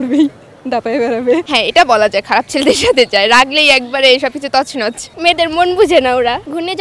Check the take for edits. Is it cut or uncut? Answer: cut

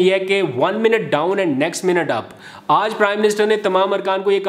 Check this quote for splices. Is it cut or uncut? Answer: uncut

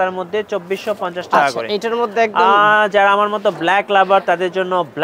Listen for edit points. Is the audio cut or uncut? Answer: uncut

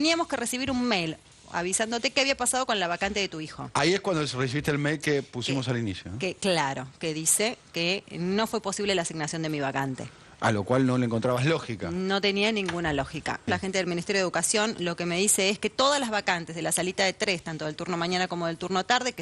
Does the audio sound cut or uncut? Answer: cut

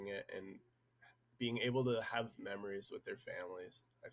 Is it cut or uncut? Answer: uncut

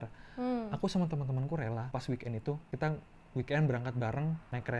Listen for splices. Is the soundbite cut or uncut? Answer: cut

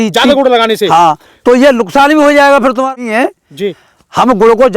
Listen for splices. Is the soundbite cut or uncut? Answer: cut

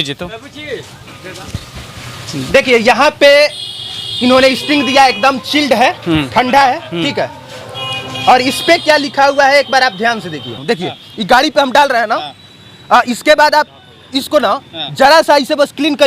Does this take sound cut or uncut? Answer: cut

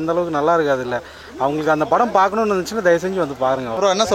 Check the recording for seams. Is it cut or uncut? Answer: uncut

